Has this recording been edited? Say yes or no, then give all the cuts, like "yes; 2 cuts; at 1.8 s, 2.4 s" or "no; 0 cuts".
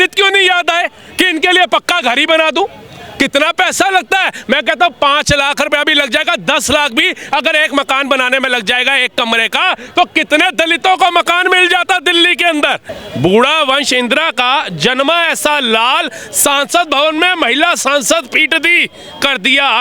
yes; 1 cut; at 13.0 s